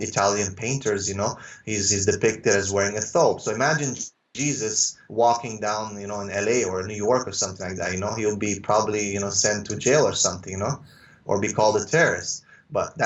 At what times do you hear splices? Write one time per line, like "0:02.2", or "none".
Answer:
none